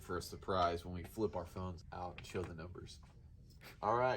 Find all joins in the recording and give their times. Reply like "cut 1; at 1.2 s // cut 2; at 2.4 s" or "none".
cut 1; at 1.8 s